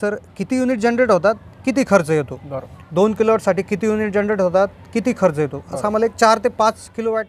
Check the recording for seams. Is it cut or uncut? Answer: uncut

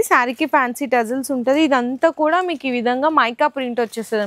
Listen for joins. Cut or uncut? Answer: uncut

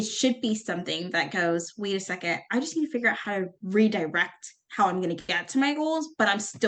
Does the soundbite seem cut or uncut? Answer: uncut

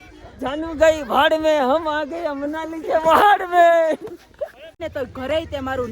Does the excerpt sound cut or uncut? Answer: cut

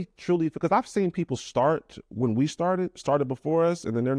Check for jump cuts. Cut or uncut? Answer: uncut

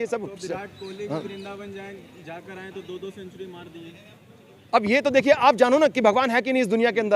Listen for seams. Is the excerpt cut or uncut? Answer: uncut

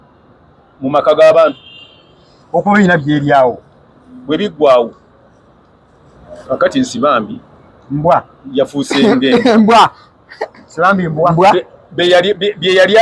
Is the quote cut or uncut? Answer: uncut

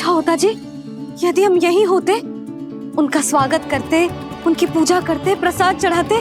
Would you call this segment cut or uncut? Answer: uncut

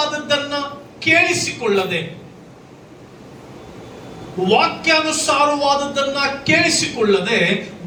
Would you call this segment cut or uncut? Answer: uncut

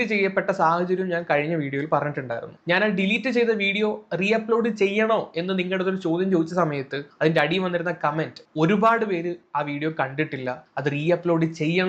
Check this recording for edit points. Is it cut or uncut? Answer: uncut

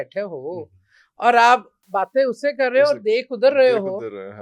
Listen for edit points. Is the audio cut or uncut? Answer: cut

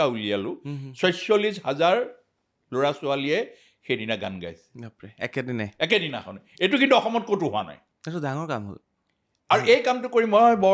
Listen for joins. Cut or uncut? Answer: cut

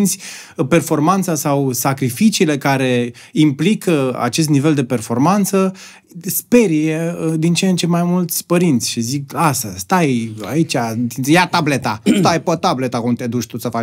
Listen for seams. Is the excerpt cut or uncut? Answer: uncut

